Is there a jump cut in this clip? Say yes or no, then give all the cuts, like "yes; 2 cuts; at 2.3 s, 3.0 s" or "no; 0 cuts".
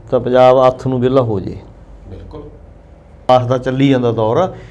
yes; 1 cut; at 3.3 s